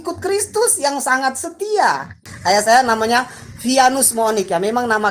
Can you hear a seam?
yes; 1 cut; at 2.2 s

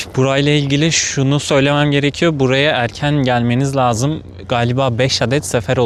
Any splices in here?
no; 0 cuts

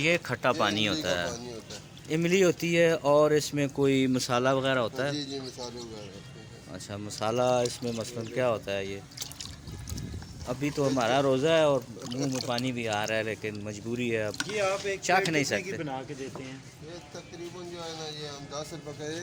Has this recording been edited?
no; 0 cuts

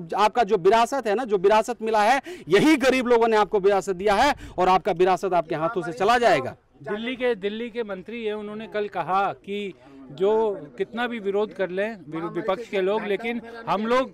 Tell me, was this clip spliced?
no; 0 cuts

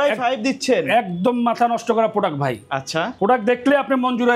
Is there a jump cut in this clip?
no; 0 cuts

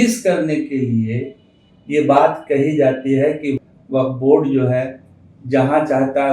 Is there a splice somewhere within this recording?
yes; 1 cut; at 3.6 s

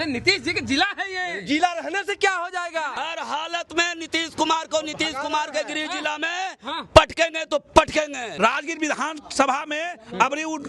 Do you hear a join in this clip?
yes; 2 cuts; at 2.9 s, 8.2 s

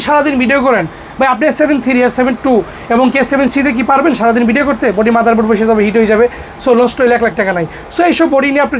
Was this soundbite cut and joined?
no; 0 cuts

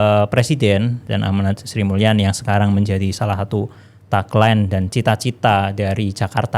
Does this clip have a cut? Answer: no; 0 cuts

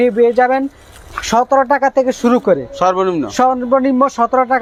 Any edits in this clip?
no; 0 cuts

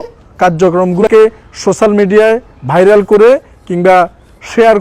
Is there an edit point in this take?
yes; 1 cut; at 1.0 s

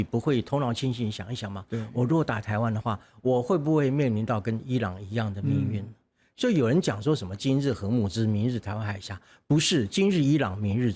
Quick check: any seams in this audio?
no; 0 cuts

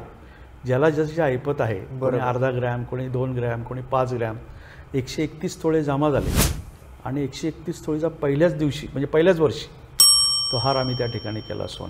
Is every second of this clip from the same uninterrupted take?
yes; 0 cuts

